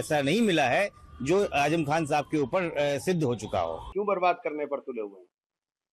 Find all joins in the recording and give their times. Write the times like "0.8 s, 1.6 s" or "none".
3.9 s